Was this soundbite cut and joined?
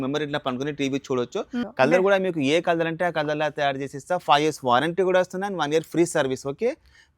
yes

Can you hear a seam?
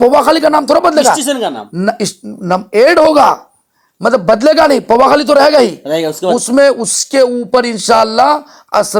no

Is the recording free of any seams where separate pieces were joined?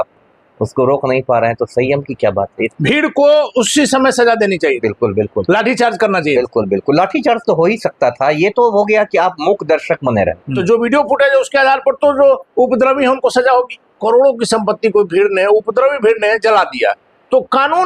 no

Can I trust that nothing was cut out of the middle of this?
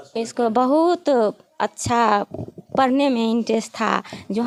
yes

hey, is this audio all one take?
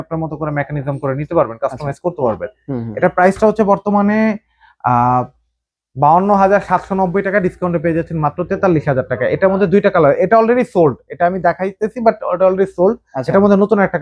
yes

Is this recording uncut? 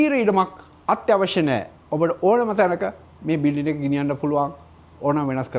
yes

